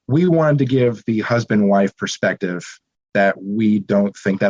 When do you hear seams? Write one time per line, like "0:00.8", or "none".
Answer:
none